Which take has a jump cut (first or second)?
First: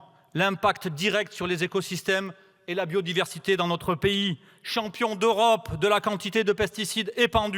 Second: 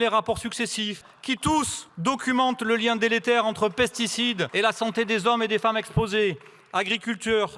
second